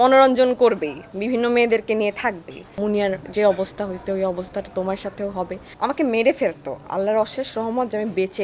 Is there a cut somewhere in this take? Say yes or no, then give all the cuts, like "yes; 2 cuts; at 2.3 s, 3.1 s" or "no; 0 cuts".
yes; 2 cuts; at 2.7 s, 5.6 s